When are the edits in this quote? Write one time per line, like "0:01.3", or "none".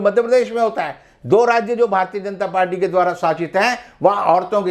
none